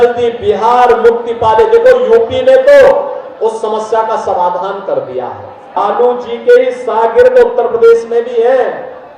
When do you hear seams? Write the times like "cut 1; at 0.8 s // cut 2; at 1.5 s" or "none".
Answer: cut 1; at 5.8 s